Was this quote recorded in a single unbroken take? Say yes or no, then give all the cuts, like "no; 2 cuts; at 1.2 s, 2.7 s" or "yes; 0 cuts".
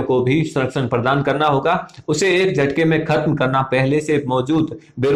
yes; 0 cuts